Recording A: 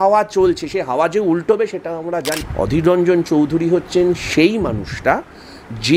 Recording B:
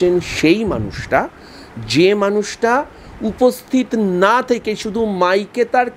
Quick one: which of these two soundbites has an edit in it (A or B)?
A